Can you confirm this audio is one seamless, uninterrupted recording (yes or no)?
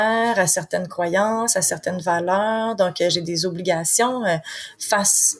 yes